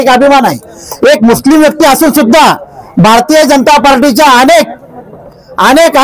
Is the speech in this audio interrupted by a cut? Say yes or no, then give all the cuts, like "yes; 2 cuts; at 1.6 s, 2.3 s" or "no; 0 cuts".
no; 0 cuts